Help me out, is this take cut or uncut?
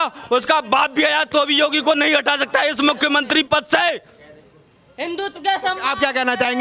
uncut